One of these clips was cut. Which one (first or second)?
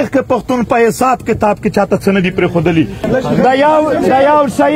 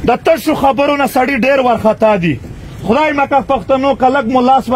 first